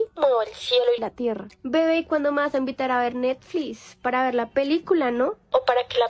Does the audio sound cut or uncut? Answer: uncut